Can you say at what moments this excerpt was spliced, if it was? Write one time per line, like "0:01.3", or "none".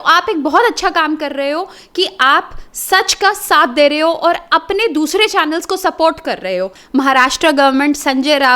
0:06.8